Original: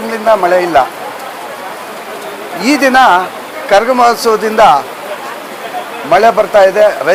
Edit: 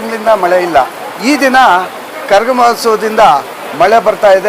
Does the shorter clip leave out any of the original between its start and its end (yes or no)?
yes